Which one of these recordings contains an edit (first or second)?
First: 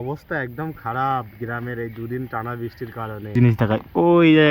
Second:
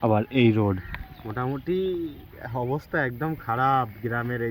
first